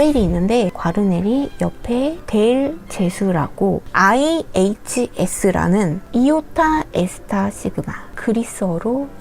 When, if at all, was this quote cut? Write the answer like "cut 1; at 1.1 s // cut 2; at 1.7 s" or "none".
cut 1; at 3.8 s // cut 2; at 6.1 s

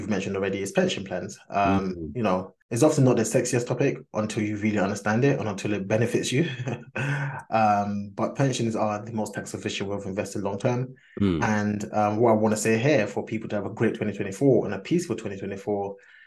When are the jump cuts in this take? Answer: cut 1; at 2.6 s

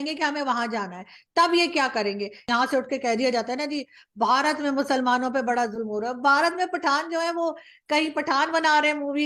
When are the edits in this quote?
cut 1; at 2.5 s

